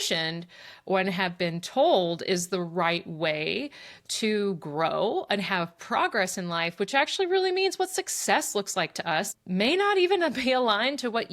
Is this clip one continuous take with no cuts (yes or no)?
no